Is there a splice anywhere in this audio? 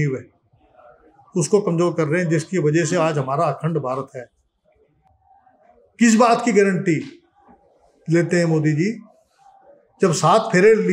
yes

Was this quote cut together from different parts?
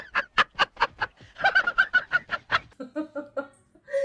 no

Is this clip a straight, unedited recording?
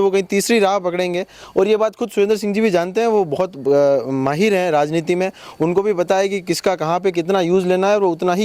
yes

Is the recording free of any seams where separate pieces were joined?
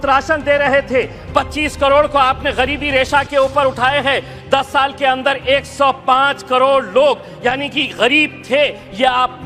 yes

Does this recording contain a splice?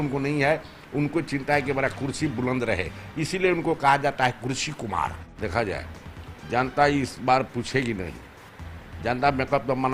yes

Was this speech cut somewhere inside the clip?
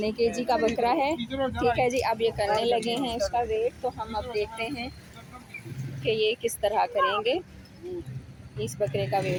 no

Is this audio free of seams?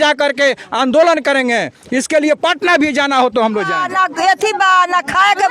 no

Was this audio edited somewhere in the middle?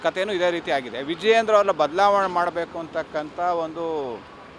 no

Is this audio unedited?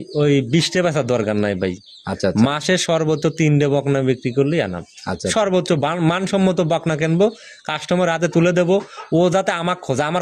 yes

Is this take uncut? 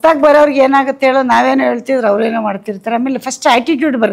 yes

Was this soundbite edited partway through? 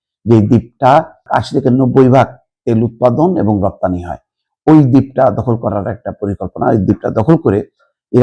yes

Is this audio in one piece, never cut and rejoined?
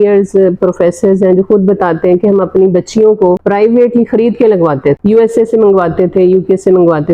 yes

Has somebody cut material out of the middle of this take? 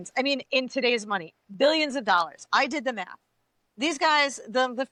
no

